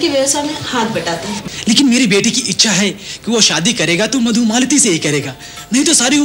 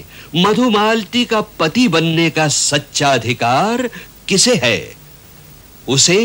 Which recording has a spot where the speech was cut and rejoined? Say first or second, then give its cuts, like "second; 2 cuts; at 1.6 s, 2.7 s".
first; 1 cut; at 1.4 s